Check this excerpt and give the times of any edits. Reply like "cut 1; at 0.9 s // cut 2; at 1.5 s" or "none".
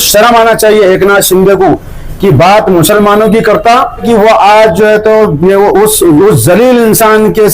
cut 1; at 4.0 s